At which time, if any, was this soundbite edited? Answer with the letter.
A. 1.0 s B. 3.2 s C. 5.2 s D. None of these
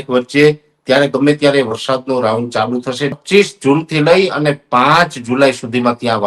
B